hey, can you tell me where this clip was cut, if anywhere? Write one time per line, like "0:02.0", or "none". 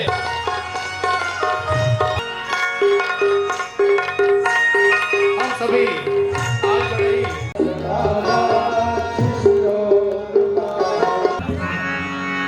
0:07.5
0:11.4